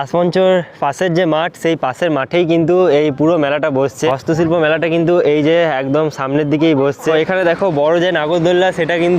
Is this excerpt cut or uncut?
cut